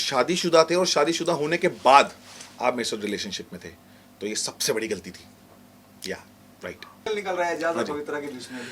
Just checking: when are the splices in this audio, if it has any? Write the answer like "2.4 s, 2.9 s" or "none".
7.0 s